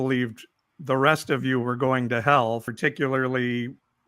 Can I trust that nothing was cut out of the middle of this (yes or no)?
no